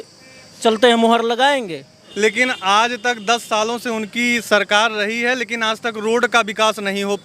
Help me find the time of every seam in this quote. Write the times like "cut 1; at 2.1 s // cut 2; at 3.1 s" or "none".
cut 1; at 2.0 s